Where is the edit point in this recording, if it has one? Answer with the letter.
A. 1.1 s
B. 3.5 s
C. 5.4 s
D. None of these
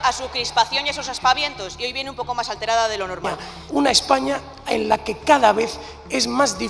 B